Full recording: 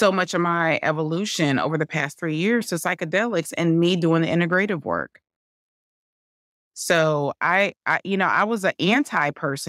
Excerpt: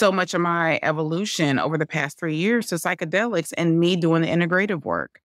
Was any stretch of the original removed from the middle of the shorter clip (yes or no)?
no